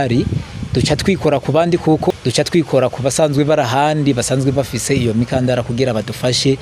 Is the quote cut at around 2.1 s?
yes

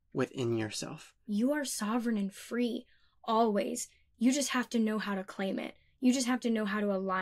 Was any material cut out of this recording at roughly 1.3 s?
yes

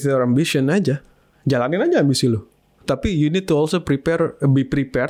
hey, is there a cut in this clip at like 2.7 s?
no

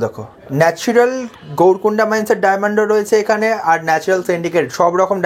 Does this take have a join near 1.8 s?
no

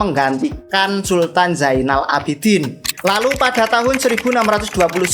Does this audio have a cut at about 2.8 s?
yes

